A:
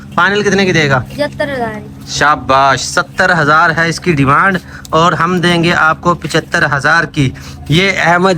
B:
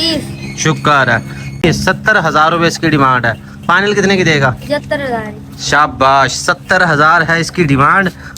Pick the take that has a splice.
B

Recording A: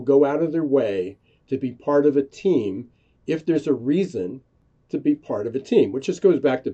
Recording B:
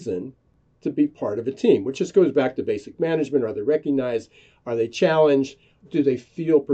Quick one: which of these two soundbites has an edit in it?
B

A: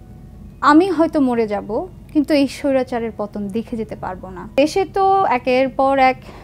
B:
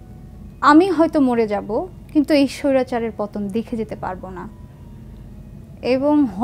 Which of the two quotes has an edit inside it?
A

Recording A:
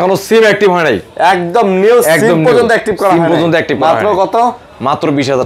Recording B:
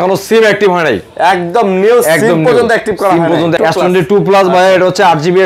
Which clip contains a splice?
B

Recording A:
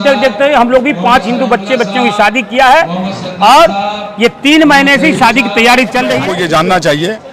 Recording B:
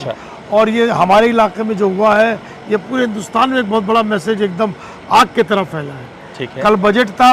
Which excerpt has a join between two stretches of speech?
A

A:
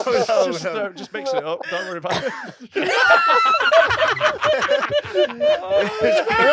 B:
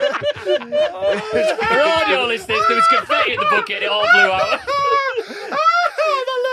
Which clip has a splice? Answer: A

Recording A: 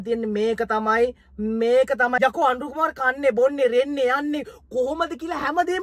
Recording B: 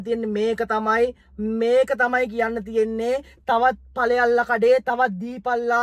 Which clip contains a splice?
A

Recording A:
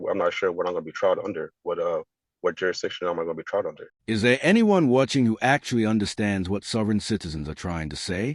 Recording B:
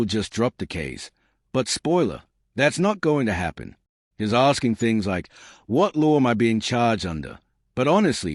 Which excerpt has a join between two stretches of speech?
A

